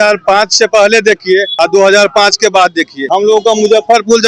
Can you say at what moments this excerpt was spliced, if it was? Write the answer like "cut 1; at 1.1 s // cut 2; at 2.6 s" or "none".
cut 1; at 1.5 s // cut 2; at 2.9 s